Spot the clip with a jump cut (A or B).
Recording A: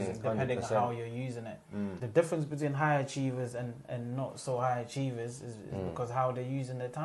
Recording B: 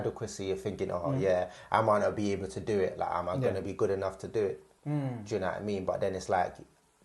A